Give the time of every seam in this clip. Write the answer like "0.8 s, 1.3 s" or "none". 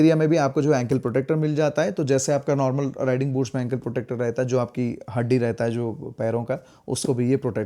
none